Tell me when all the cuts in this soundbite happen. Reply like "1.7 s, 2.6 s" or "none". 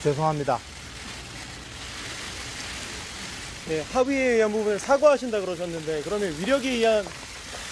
4.9 s